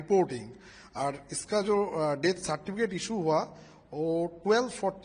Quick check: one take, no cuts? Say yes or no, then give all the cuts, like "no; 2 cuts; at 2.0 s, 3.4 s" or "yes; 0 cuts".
yes; 0 cuts